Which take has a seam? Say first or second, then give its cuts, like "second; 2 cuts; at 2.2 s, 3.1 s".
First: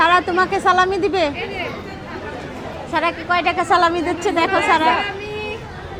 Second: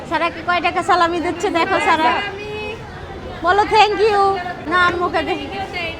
second; 1 cut; at 4.6 s